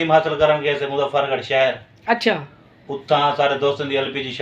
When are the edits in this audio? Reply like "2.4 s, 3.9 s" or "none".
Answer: none